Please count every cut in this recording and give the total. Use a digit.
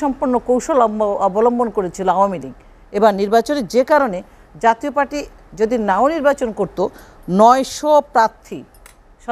0